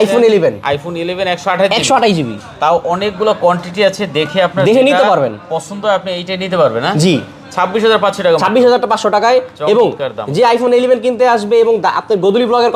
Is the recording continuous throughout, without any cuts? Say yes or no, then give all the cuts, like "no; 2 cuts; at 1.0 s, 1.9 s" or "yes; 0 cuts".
yes; 0 cuts